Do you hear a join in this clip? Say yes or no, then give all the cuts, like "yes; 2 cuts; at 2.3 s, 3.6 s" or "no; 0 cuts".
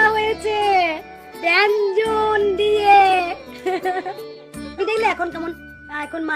yes; 1 cut; at 4.7 s